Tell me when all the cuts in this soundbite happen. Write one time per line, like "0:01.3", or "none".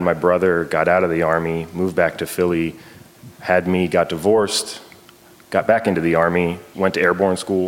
0:06.6

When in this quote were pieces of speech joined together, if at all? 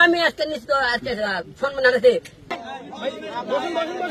0:02.5

